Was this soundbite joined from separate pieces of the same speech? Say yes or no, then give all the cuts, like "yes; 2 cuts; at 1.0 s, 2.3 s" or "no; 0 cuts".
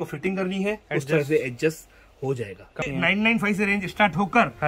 yes; 1 cut; at 2.8 s